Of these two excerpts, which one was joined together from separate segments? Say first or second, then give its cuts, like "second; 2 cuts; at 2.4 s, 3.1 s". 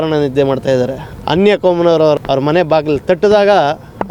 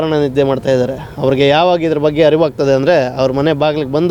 first; 2 cuts; at 1.0 s, 2.2 s